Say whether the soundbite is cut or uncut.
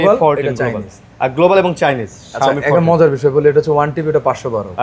uncut